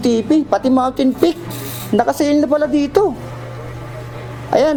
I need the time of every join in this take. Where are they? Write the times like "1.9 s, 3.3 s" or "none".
none